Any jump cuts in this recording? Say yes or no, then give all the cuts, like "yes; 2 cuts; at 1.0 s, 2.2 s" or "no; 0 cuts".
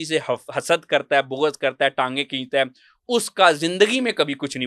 no; 0 cuts